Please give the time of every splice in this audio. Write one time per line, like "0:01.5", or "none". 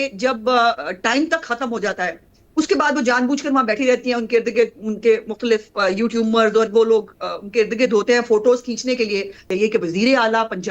0:09.5